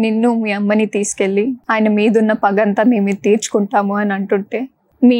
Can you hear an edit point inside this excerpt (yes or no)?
yes